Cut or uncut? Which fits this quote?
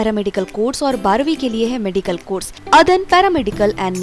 cut